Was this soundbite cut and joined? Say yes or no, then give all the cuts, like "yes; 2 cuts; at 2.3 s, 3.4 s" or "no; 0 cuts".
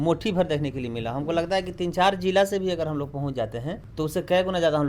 yes; 1 cut; at 3.8 s